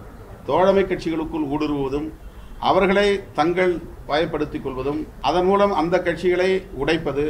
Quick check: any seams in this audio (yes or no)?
yes